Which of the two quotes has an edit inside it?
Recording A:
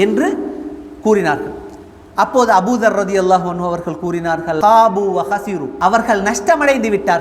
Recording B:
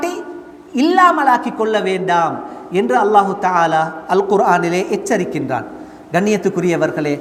A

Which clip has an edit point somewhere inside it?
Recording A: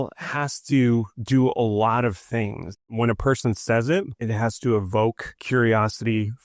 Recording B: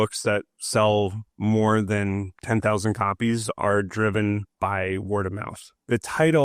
A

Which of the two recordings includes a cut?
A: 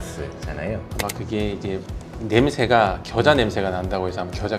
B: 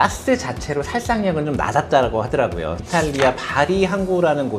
B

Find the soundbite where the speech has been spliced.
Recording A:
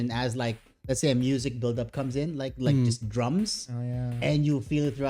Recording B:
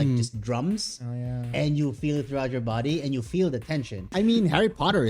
B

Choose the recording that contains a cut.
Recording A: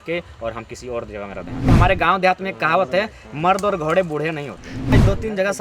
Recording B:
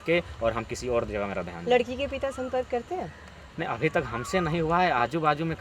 A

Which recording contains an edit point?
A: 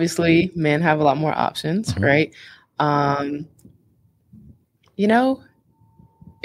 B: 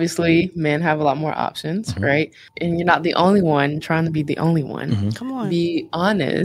B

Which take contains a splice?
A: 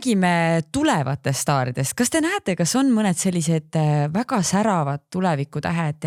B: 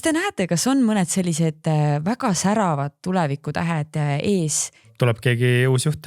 B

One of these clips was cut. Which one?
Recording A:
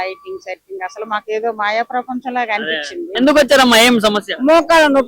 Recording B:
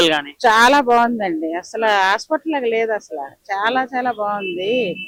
A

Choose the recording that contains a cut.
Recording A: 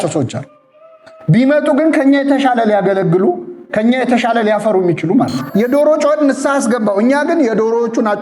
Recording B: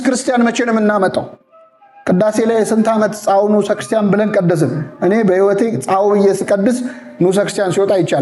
A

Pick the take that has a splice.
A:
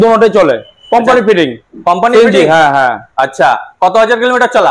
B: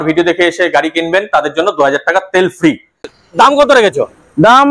B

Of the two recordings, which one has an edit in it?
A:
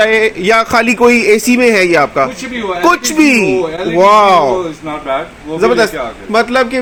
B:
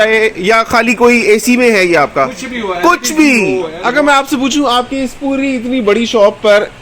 B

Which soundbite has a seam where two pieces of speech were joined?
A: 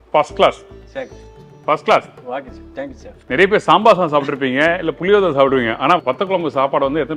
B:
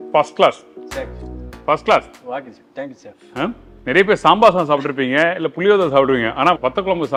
A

